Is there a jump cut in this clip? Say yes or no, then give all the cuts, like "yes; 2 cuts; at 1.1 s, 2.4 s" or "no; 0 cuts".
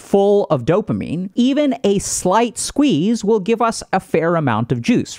yes; 1 cut; at 1.2 s